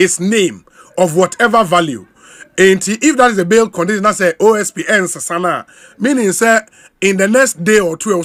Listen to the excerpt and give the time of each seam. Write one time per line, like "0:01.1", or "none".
none